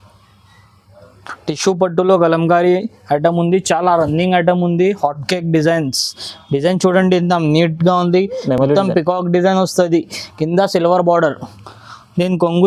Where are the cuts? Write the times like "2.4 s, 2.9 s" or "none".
none